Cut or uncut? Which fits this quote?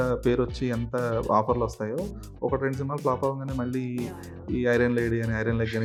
uncut